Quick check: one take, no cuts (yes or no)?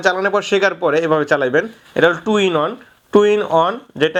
yes